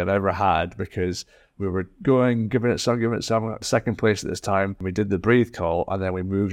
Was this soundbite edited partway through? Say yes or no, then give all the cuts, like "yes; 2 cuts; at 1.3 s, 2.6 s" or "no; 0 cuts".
yes; 2 cuts; at 3.6 s, 4.8 s